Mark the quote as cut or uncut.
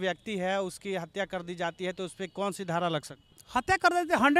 uncut